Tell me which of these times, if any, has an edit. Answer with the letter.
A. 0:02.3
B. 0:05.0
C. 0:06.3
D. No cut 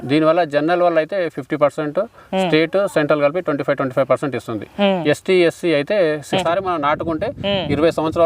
C